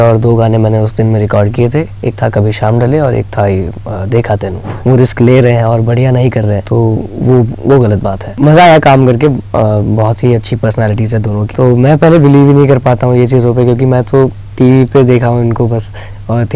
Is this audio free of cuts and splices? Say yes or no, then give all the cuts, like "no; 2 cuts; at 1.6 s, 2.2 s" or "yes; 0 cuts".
no; 4 cuts; at 4.6 s, 6.6 s, 8.2 s, 11.5 s